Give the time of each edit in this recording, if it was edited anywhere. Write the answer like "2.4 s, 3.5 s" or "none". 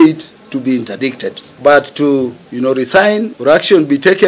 1.5 s, 2.4 s, 3.3 s